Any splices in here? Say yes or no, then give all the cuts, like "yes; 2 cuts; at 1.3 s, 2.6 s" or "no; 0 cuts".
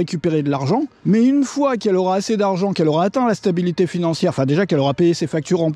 yes; 1 cut; at 0.9 s